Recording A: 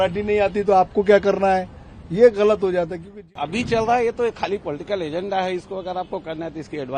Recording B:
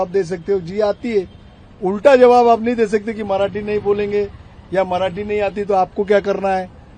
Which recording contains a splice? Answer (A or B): A